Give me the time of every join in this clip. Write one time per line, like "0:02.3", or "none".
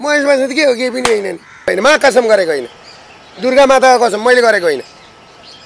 0:01.7